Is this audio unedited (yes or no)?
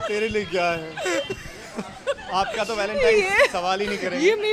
yes